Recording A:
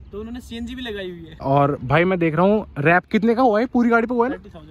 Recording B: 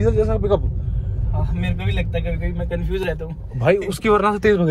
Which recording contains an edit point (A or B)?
A